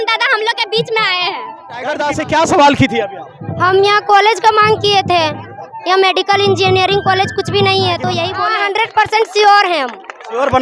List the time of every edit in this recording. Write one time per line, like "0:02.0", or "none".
0:01.9
0:08.4